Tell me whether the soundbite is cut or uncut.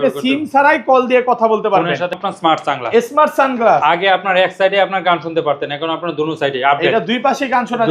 cut